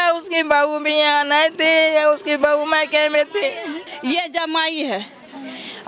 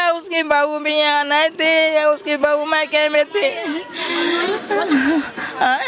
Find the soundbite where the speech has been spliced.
first; 1 cut; at 3.8 s

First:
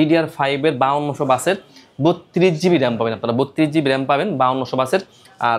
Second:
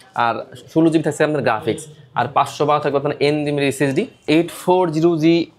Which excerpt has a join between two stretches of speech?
second; 1 cut; at 4.2 s

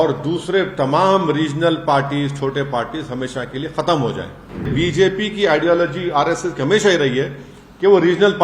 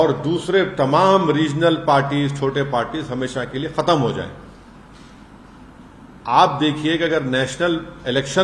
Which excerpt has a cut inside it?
first; 1 cut; at 4.7 s

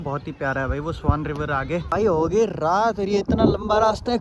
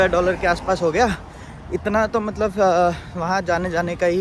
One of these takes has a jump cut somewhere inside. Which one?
first; 1 cut; at 1.9 s

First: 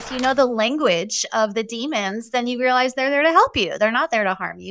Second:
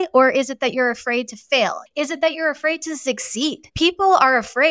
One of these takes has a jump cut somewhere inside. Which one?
second; 2 cuts; at 1.8 s, 3.6 s

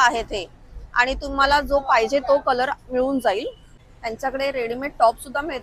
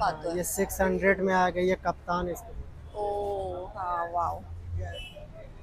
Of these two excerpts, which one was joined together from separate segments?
first; 1 cut; at 3.6 s

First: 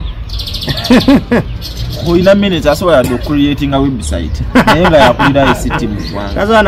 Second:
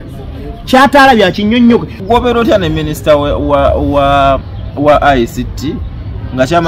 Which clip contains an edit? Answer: second; 1 cut; at 2.0 s

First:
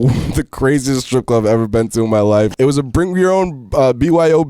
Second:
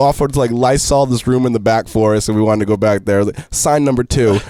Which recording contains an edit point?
first; 1 cut; at 2.5 s

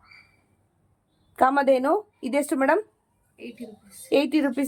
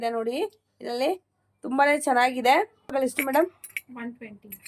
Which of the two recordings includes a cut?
second; 1 cut; at 2.9 s

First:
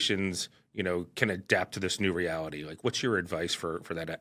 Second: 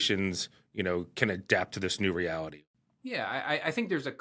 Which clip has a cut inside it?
second; 1 cut; at 2.6 s

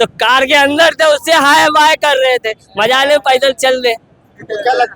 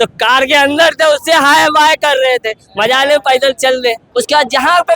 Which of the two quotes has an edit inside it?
second; 1 cut; at 4.0 s

